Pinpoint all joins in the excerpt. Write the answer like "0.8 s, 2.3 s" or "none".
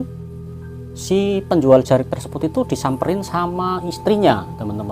none